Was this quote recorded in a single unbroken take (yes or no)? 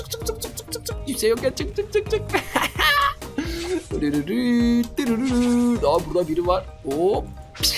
yes